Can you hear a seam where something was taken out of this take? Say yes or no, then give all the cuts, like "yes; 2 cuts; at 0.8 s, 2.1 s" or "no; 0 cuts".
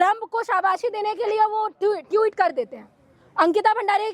no; 0 cuts